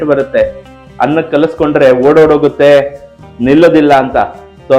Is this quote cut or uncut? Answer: uncut